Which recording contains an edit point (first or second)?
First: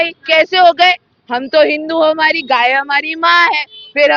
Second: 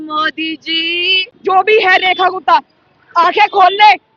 second